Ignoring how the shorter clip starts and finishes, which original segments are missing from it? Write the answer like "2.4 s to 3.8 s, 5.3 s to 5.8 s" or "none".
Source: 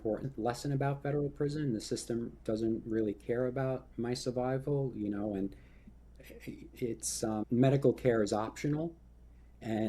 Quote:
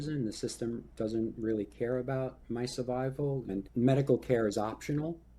5.1 s to 7.4 s

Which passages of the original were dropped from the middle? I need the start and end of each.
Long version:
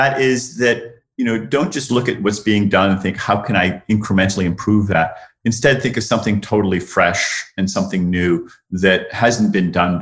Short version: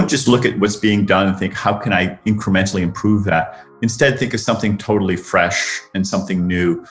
none

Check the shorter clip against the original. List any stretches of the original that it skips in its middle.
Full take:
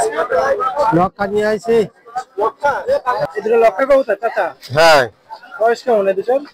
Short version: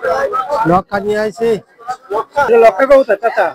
2.8 s to 3.5 s

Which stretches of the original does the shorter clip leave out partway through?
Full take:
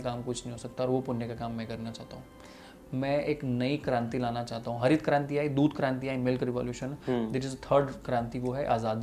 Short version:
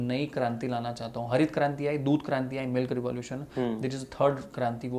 none

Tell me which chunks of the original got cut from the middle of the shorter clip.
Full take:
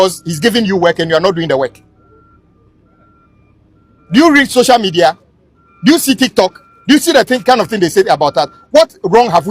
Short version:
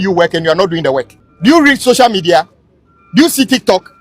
1.9 s to 3.9 s

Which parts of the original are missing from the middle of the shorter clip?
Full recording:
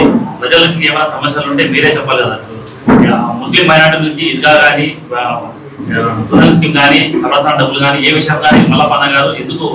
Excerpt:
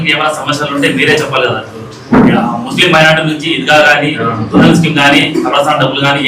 4.9 s to 6.0 s

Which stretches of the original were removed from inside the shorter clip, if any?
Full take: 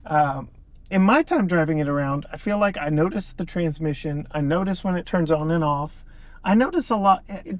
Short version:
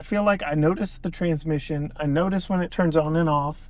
none

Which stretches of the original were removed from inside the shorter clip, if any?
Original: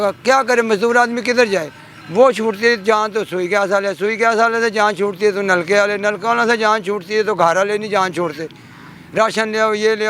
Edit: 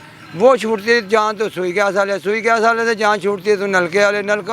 none

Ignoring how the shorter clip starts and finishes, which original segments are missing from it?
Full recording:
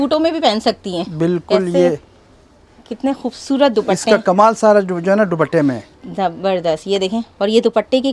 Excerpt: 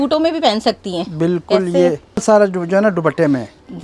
2.2 s to 4.6 s

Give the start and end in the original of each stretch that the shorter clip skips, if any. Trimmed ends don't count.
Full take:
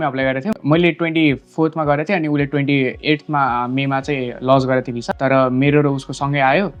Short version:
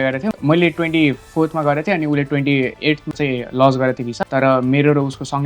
3.3 s to 4.0 s

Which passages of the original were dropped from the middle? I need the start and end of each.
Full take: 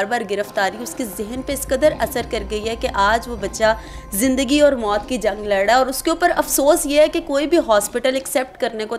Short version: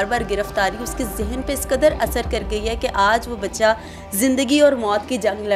none

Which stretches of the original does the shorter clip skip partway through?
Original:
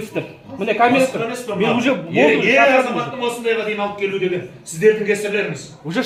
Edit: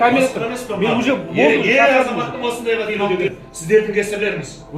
3.8 s to 4.1 s

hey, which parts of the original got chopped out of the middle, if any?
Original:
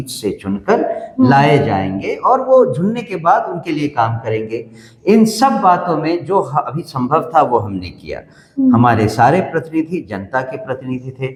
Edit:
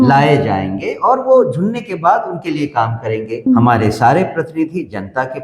4.7 s to 8.6 s

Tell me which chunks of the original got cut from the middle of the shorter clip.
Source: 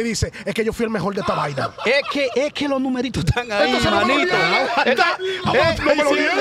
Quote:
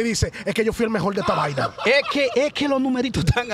none

